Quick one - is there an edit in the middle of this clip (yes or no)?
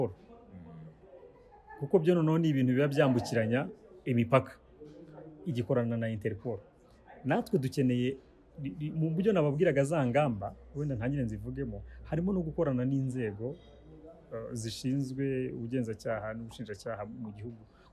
no